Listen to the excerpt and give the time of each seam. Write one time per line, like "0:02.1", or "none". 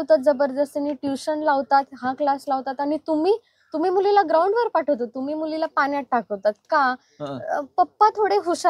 none